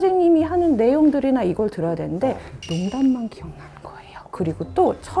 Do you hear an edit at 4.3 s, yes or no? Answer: yes